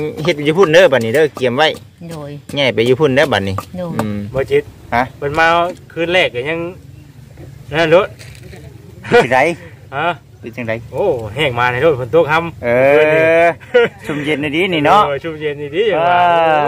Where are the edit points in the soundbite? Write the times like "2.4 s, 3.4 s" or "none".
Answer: 4.2 s